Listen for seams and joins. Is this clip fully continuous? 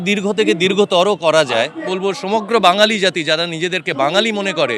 no; 1 cut; at 1.9 s

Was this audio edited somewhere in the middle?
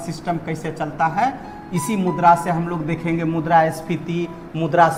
no; 0 cuts

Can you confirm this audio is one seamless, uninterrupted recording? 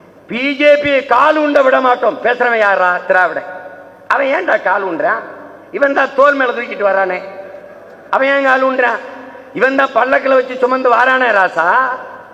yes; 0 cuts

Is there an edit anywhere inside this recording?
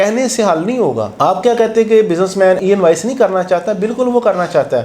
yes; 1 cut; at 2.6 s

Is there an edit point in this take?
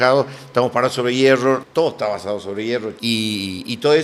yes; 2 cuts; at 1.6 s, 2.9 s

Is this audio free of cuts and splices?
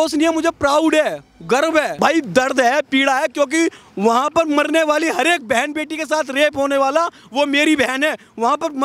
no; 1 cut; at 2.0 s

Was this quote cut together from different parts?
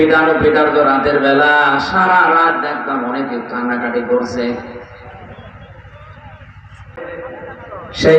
yes; 1 cut; at 7.0 s

